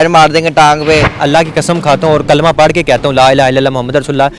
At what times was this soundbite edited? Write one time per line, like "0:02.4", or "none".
0:01.2